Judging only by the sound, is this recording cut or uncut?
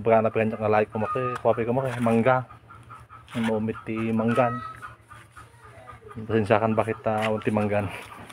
uncut